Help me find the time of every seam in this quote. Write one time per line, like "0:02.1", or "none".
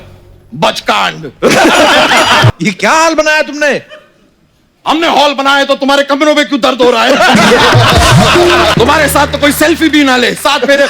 0:02.5
0:08.7